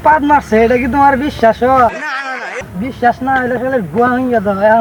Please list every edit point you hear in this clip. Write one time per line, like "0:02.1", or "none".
none